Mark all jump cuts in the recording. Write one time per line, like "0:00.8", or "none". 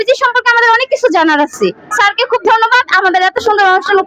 0:01.9